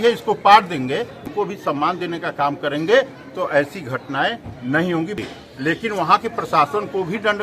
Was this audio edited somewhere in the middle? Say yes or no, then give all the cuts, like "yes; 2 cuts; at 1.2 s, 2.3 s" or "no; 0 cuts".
yes; 2 cuts; at 1.3 s, 5.2 s